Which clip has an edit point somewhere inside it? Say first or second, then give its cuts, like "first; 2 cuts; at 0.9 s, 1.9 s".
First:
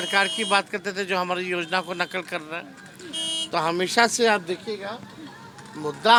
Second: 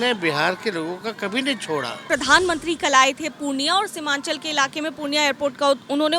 second; 1 cut; at 2.1 s